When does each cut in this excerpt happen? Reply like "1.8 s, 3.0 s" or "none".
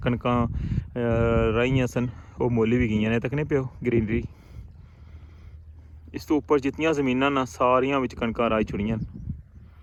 none